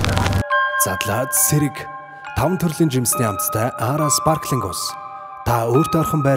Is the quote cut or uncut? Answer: uncut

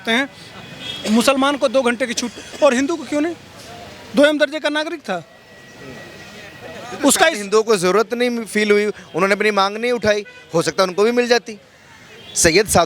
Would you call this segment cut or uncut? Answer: uncut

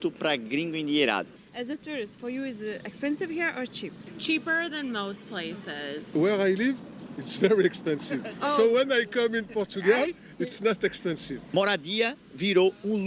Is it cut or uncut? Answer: cut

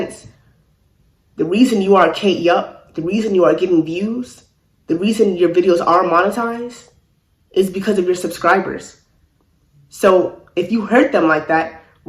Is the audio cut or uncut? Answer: uncut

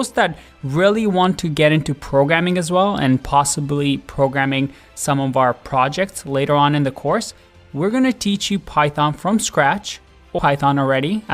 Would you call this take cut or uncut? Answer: cut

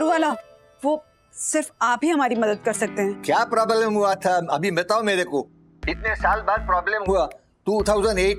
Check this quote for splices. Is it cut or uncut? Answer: uncut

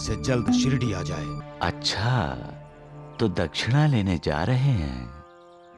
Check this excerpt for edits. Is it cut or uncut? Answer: cut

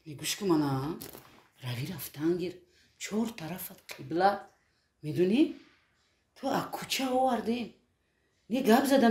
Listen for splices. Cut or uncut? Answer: uncut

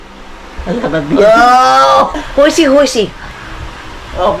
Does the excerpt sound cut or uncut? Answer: cut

